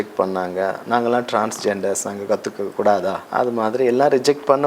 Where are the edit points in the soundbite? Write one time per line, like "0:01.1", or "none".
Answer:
0:03.2